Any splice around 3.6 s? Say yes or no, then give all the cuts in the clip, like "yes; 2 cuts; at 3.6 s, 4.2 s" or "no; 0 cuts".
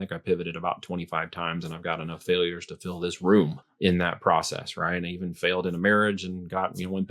yes; 1 cut; at 3.6 s